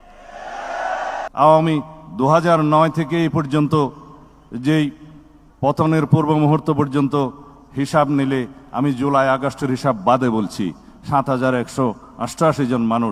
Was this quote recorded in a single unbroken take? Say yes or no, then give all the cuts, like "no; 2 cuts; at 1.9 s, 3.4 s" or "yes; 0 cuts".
no; 1 cut; at 1.3 s